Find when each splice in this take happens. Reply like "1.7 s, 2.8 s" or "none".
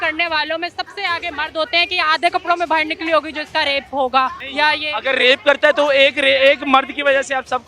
4.4 s